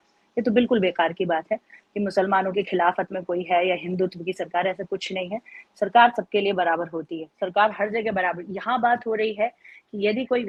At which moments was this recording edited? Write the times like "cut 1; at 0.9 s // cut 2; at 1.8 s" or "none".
none